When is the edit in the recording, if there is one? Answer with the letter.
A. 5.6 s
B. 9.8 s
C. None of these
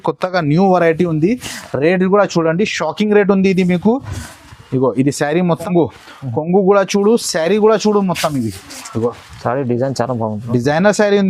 A